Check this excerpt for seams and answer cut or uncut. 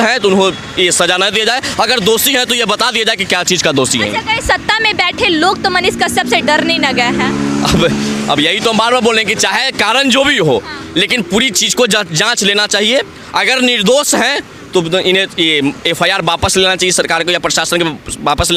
uncut